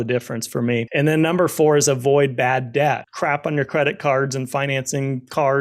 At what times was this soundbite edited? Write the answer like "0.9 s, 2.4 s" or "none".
0.9 s, 3.1 s